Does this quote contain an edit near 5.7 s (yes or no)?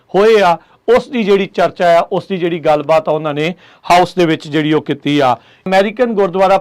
yes